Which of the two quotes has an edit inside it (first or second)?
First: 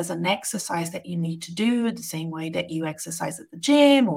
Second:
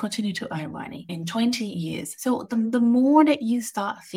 second